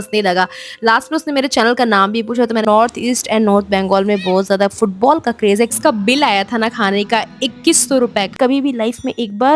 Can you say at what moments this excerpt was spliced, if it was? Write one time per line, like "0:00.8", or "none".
0:02.6
0:05.8
0:08.3